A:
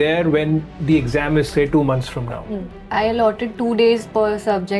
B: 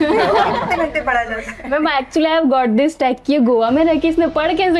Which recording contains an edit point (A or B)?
A